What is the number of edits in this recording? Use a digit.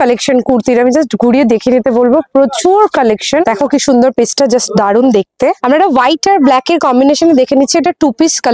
2